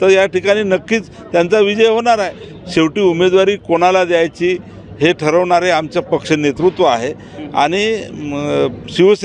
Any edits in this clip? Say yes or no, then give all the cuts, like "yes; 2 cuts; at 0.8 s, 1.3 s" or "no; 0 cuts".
no; 0 cuts